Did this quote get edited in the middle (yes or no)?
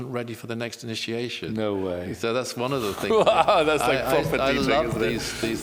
no